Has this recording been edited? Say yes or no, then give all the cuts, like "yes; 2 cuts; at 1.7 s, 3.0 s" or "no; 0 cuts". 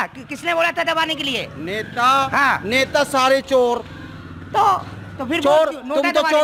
no; 0 cuts